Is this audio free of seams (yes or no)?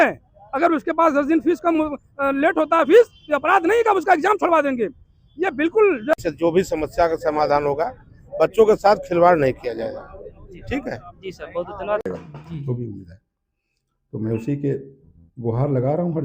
no